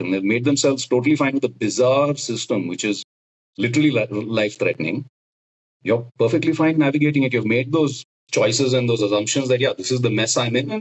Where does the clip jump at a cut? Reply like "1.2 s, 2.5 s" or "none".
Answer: none